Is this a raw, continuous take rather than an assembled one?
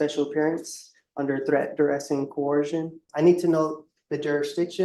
no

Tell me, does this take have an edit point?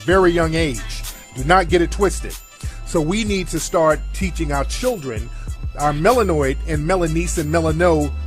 yes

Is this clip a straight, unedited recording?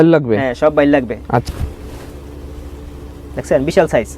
no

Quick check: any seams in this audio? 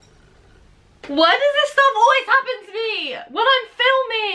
no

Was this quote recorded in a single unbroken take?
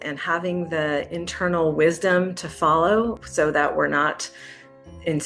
no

